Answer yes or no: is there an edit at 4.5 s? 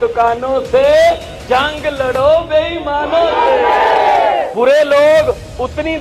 yes